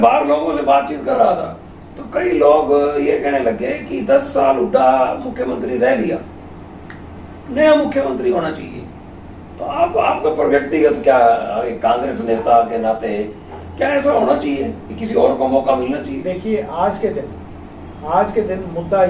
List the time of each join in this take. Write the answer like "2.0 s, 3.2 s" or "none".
none